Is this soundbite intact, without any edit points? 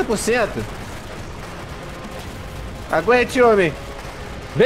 yes; 0 cuts

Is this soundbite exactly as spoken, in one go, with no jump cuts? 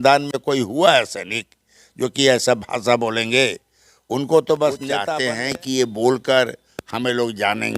no; 1 cut; at 5.0 s

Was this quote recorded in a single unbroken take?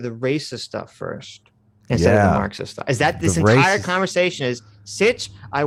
yes; 0 cuts

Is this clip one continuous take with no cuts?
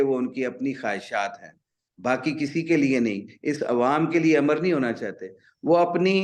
yes; 0 cuts

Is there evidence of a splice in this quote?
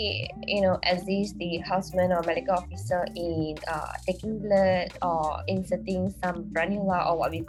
no; 0 cuts

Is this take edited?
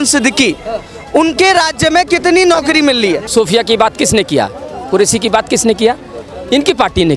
yes; 1 cut; at 3.3 s

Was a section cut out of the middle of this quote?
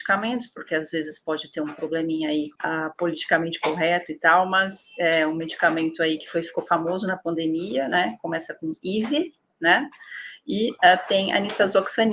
yes; 1 cut; at 2.5 s

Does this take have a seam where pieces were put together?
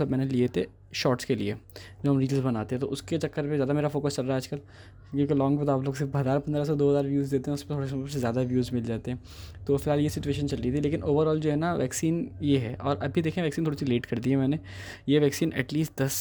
no; 0 cuts

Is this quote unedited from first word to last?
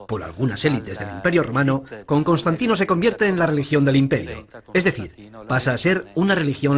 no; 1 cut; at 5.4 s

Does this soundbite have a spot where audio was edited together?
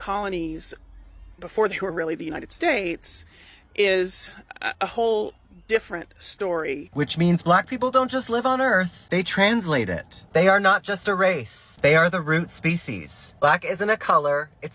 yes; 1 cut; at 6.9 s

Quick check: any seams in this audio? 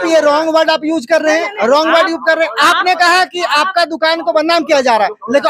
no; 0 cuts

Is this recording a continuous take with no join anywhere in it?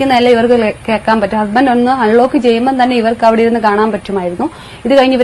yes; 0 cuts

